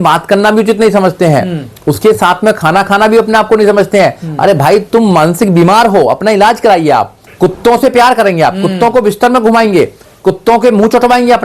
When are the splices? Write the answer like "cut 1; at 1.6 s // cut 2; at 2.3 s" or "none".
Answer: cut 1; at 7.2 s